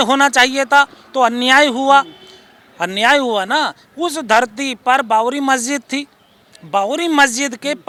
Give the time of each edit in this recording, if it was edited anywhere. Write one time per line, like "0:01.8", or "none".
none